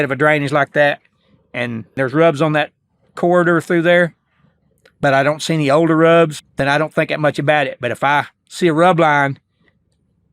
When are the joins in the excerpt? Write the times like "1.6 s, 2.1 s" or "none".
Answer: 1.9 s, 6.4 s